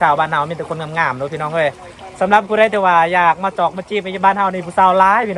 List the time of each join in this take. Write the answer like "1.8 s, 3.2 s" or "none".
none